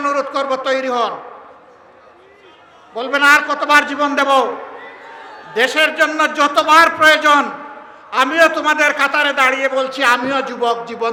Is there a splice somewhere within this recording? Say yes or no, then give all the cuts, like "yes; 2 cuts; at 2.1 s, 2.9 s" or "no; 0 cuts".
no; 0 cuts